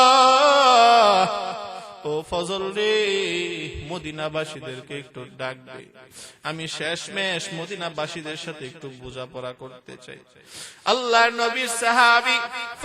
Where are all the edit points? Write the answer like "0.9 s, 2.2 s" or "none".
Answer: none